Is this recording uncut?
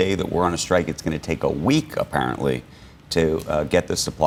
yes; 0 cuts

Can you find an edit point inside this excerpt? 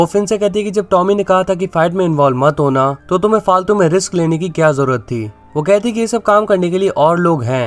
yes; 1 cut; at 3.0 s

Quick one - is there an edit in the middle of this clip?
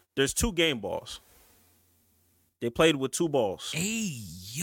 yes; 1 cut; at 3.7 s

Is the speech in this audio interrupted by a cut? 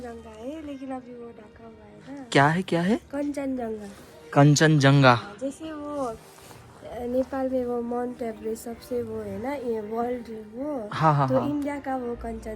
no; 0 cuts

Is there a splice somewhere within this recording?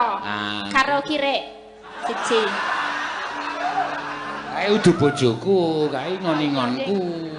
no; 0 cuts

